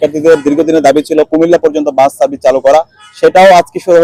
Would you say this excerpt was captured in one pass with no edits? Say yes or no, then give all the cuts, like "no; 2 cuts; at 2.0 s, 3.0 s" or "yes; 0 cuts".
yes; 0 cuts